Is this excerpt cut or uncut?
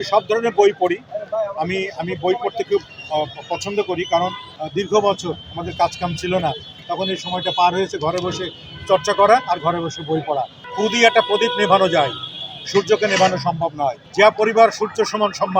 cut